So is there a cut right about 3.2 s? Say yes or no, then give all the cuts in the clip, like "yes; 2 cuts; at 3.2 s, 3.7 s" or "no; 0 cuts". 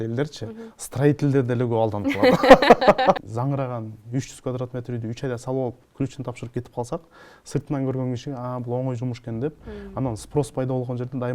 yes; 1 cut; at 3.2 s